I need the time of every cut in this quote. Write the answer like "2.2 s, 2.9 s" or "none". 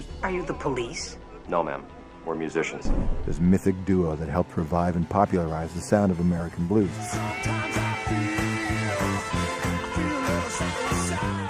7.0 s